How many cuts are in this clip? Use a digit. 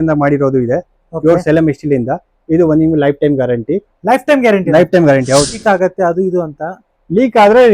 1